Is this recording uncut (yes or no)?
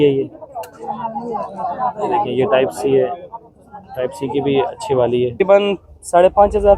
no